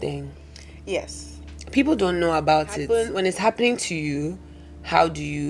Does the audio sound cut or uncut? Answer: uncut